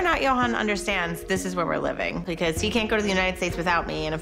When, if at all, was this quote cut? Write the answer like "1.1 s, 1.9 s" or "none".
2.2 s